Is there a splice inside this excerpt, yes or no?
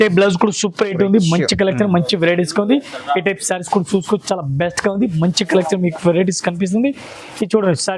no